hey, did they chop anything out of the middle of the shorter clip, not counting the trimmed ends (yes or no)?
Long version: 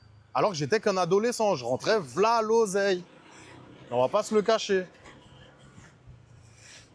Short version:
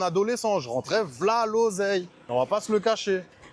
yes